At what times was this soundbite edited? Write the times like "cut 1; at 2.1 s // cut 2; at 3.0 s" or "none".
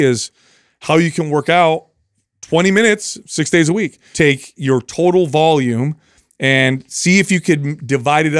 cut 1; at 4.0 s